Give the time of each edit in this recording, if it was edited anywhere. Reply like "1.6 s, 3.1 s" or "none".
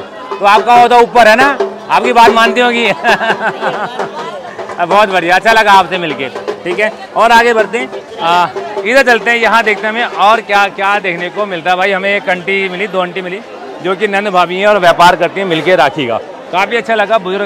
none